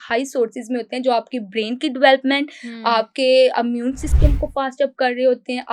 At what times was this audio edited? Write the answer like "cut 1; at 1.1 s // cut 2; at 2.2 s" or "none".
none